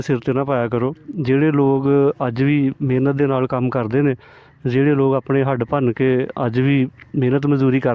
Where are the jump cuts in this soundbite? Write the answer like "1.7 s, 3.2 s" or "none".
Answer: none